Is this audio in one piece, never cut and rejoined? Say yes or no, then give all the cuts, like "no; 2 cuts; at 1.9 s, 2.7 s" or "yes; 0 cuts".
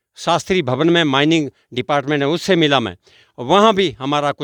yes; 0 cuts